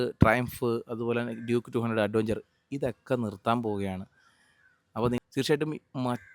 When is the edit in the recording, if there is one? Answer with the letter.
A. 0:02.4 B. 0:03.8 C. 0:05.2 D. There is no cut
C